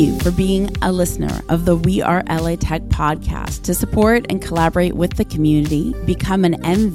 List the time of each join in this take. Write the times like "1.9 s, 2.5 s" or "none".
none